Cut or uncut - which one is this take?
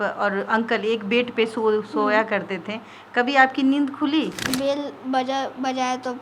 cut